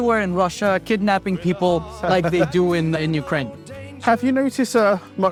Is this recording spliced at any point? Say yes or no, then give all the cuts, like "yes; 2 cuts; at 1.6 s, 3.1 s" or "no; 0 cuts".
no; 0 cuts